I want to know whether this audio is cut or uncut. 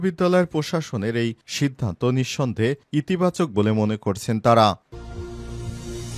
cut